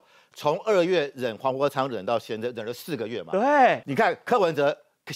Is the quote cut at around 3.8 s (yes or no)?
yes